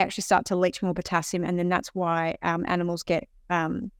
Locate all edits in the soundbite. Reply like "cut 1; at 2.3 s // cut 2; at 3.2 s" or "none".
none